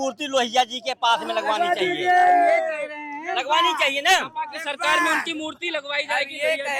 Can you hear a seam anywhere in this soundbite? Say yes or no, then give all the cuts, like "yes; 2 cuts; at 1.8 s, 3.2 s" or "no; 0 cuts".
no; 0 cuts